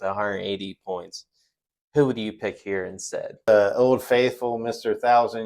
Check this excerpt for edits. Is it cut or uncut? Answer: cut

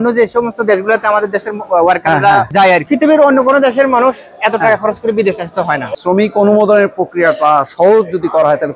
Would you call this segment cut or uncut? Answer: cut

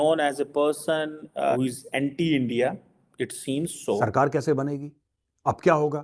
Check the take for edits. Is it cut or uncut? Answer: cut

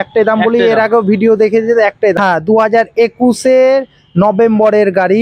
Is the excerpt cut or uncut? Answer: cut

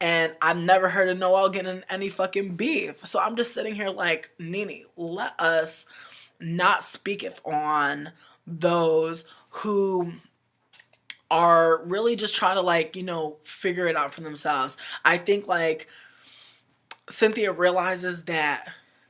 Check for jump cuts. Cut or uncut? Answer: uncut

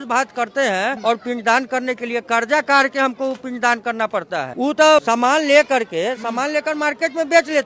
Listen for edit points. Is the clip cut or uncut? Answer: cut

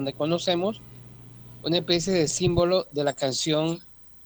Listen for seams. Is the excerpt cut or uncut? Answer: uncut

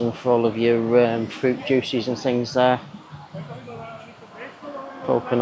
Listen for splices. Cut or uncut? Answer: uncut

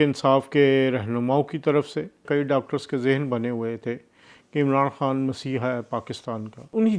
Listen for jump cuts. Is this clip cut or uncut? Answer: cut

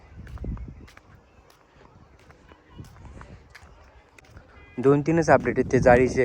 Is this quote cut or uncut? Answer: cut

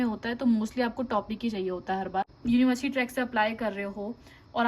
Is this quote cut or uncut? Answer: cut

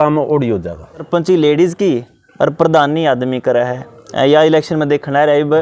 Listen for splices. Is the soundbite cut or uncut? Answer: cut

